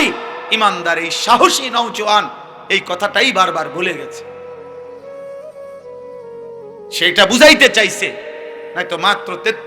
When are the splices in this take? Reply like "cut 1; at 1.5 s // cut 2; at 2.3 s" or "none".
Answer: cut 1; at 4.3 s // cut 2; at 7.0 s